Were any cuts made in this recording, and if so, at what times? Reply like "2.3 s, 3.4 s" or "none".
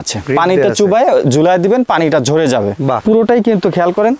3.0 s